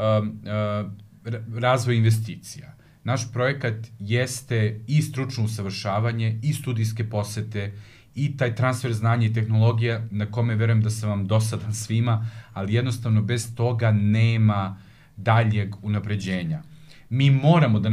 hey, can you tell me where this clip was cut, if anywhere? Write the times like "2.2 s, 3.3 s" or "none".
none